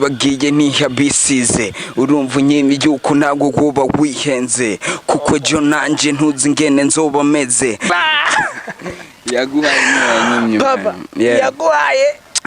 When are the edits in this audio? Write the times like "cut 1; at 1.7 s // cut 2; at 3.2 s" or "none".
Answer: cut 1; at 7.9 s